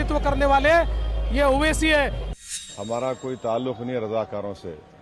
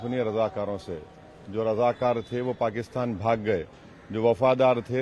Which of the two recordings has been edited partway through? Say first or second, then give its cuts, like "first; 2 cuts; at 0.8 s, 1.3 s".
first; 1 cut; at 2.4 s